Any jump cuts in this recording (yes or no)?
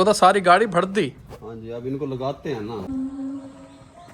yes